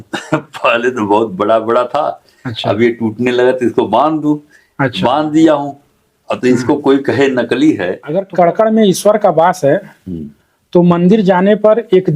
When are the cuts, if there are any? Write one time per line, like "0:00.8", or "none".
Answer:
0:08.1